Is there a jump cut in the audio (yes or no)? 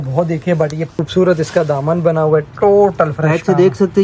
yes